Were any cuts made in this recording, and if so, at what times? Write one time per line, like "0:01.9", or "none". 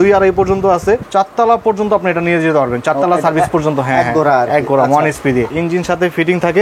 0:01.1
0:05.5